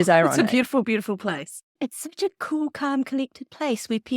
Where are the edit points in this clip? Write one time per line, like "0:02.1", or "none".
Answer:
0:01.7